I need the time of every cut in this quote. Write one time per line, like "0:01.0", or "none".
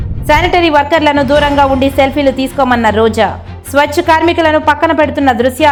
none

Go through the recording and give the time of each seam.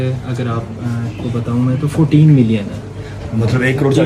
none

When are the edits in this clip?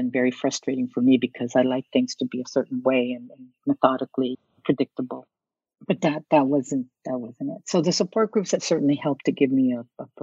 none

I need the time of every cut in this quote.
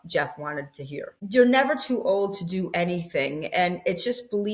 0:01.1

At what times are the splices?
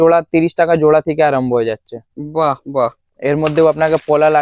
none

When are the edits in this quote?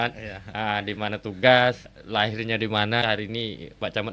0:01.9
0:03.0

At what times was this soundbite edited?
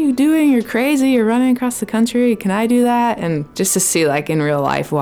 0:03.5

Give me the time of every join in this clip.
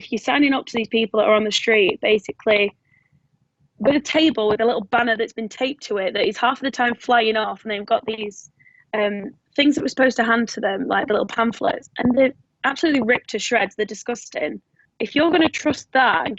0:14.9

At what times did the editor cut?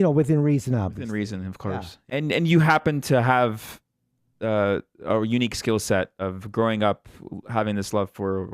0:02.0

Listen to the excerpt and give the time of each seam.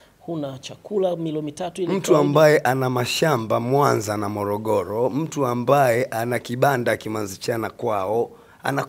none

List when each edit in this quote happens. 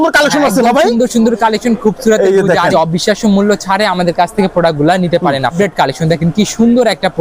0:02.7
0:05.5

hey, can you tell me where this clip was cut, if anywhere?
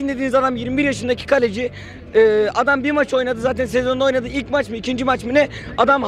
none

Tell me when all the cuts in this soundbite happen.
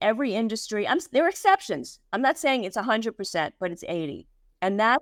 none

